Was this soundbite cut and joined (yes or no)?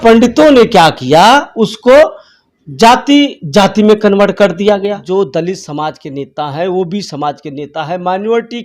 yes